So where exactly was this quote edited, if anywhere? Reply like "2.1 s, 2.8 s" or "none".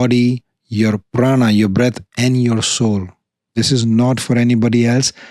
3.5 s